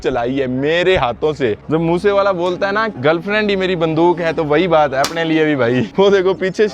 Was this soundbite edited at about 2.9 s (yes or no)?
yes